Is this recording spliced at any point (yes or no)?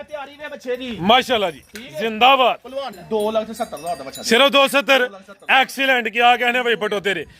yes